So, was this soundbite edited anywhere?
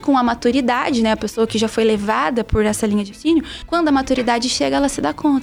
no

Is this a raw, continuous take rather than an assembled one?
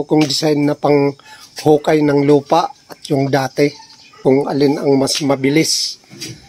no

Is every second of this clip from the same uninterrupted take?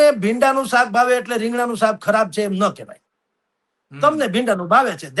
yes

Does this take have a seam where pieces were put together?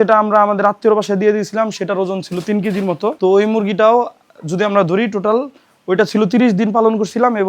yes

